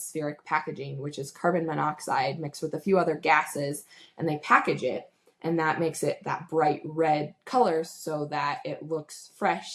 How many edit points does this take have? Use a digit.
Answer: 0